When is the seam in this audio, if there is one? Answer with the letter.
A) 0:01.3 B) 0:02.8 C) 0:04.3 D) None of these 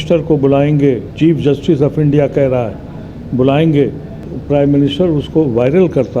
C